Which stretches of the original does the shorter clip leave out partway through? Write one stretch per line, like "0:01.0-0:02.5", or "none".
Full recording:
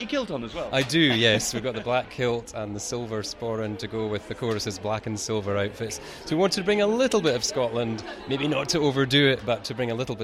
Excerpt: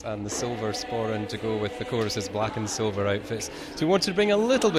none